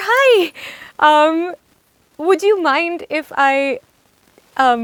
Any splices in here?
no; 0 cuts

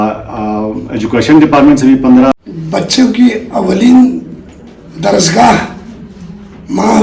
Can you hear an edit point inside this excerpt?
yes; 1 cut; at 2.3 s

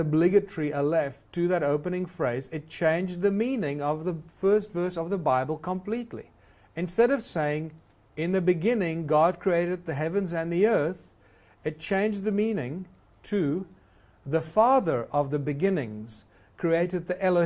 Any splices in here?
no; 0 cuts

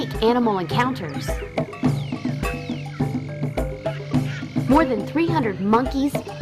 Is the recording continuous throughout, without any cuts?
yes; 0 cuts

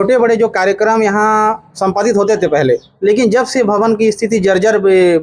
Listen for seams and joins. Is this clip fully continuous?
yes; 0 cuts

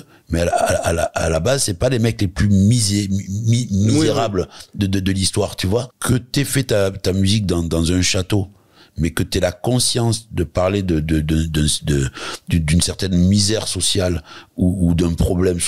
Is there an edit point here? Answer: yes; 1 cut; at 5.9 s

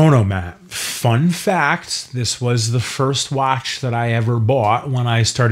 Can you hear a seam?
no; 0 cuts

